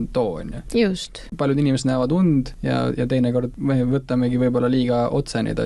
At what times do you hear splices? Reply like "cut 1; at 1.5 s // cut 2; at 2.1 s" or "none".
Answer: cut 1; at 1.2 s // cut 2; at 2.6 s // cut 3; at 3.5 s